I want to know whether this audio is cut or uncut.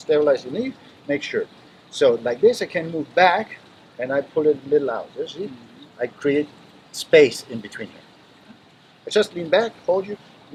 uncut